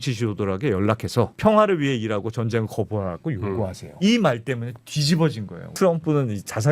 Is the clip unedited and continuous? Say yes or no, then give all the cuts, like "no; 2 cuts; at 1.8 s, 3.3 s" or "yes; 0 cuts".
no; 3 cuts; at 1.3 s, 3.8 s, 5.7 s